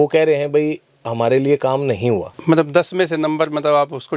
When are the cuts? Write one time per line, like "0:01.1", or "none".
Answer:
none